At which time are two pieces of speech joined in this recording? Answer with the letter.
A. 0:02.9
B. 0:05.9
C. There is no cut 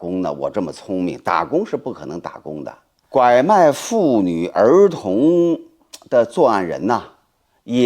A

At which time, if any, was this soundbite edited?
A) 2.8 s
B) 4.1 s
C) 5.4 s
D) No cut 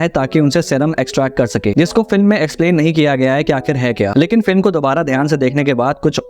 B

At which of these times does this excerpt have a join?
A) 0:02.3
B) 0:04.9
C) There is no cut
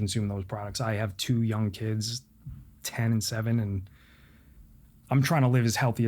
B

